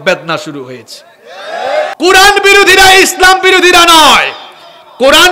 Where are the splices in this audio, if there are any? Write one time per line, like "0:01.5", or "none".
0:01.9